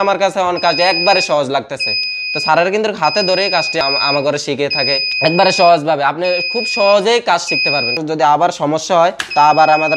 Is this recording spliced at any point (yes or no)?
yes